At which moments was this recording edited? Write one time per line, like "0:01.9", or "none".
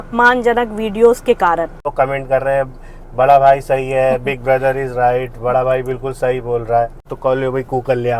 0:01.9
0:07.1